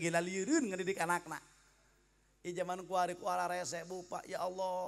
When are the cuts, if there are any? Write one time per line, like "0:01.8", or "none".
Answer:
none